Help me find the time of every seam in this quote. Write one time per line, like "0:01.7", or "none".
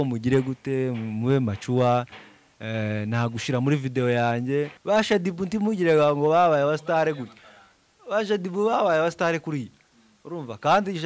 0:04.8